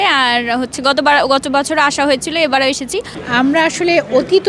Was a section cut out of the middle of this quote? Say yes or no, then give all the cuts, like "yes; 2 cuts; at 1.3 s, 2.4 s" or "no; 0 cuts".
yes; 1 cut; at 3.2 s